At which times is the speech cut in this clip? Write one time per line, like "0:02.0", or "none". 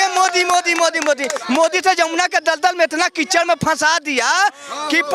none